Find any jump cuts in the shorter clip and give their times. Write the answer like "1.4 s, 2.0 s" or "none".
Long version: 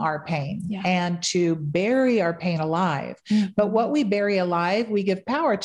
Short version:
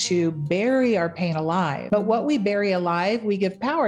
1.8 s